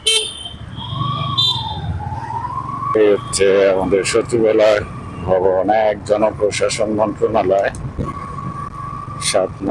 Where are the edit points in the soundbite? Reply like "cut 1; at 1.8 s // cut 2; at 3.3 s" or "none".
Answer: cut 1; at 3.0 s // cut 2; at 8.0 s